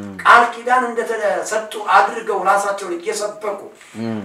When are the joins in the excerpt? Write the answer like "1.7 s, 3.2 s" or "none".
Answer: none